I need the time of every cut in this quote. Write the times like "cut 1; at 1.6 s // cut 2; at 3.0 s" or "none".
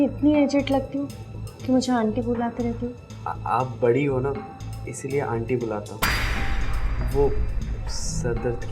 none